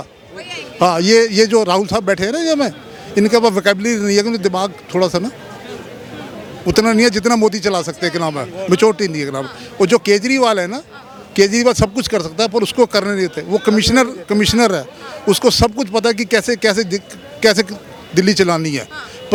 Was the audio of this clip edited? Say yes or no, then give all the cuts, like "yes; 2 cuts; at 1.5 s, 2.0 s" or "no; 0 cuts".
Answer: no; 0 cuts